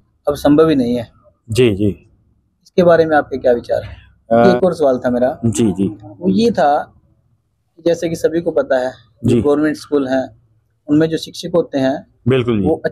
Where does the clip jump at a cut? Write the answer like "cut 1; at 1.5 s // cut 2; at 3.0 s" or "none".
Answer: cut 1; at 4.5 s